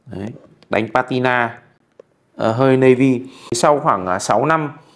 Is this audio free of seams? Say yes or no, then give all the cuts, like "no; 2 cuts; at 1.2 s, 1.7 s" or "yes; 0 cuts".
no; 1 cut; at 3.6 s